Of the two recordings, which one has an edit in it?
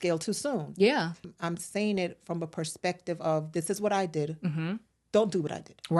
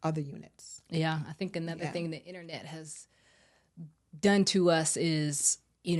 first; 1 cut; at 1.3 s

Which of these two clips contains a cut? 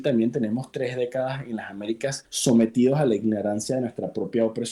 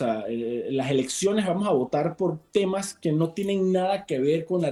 first; 1 cut; at 2.3 s

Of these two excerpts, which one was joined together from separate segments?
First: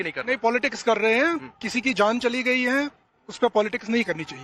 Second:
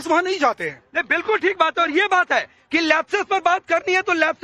second; 1 cut; at 2.5 s

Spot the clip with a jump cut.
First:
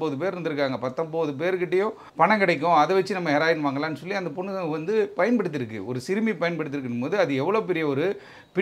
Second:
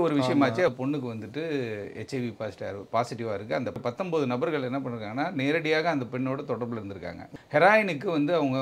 second; 3 cuts; at 0.7 s, 3.8 s, 7.3 s

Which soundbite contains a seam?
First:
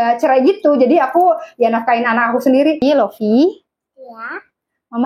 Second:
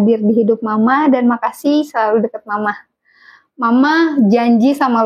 first; 1 cut; at 2.8 s

